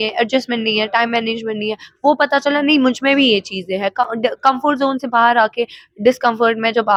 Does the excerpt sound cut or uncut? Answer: uncut